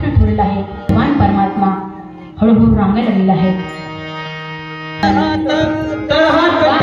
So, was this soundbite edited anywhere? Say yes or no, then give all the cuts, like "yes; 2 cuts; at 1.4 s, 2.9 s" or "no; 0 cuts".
yes; 2 cuts; at 0.9 s, 5.0 s